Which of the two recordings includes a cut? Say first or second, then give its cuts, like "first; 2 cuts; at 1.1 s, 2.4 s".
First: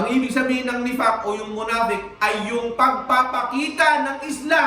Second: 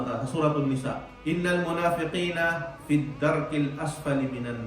second; 1 cut; at 1.1 s